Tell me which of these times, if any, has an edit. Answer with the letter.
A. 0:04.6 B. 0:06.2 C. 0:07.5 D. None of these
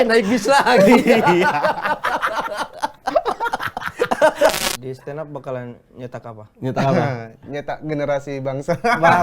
A